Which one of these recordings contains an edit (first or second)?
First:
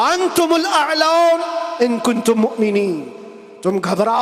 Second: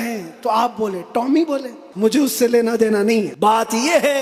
second